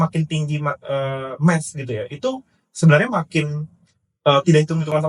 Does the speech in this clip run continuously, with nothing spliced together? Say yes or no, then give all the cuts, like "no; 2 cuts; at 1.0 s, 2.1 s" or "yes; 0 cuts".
yes; 0 cuts